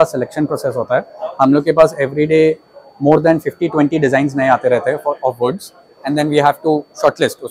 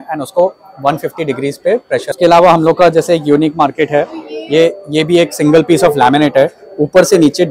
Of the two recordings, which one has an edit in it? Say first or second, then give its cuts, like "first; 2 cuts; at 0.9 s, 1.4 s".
second; 1 cut; at 2.2 s